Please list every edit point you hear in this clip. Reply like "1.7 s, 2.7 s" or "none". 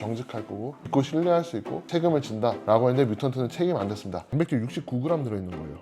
1.8 s, 4.2 s